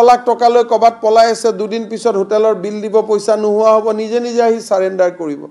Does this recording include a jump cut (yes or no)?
no